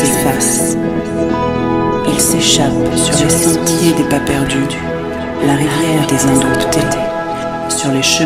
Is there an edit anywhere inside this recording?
no; 0 cuts

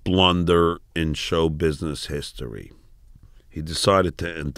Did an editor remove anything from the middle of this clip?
no; 0 cuts

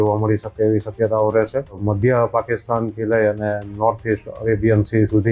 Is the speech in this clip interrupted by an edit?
yes; 1 cut; at 1.8 s

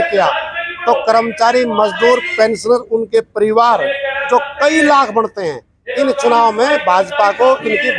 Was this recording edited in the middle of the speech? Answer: no; 0 cuts

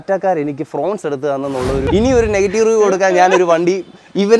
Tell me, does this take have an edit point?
yes; 1 cut; at 1.8 s

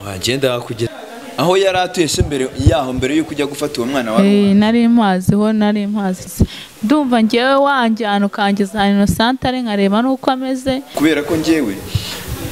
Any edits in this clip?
yes; 3 cuts; at 0.9 s, 6.3 s, 11.0 s

